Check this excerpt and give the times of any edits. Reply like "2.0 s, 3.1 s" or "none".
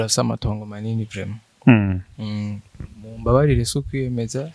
none